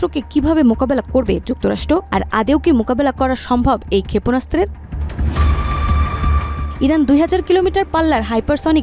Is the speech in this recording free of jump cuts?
yes; 0 cuts

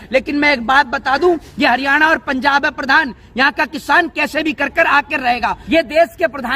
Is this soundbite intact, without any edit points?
no; 1 cut; at 5.6 s

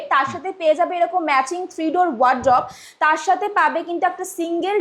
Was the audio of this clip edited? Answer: no; 0 cuts

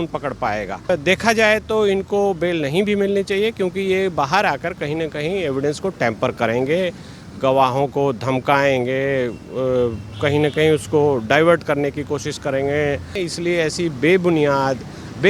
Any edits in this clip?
yes; 2 cuts; at 0.9 s, 13.2 s

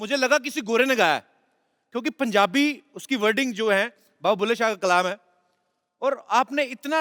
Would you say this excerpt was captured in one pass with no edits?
yes; 0 cuts

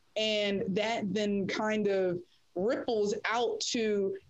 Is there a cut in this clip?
no; 0 cuts

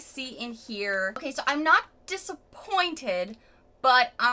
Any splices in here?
yes; 1 cut; at 1.2 s

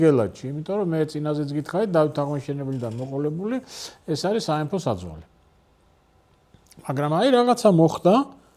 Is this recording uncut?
yes; 0 cuts

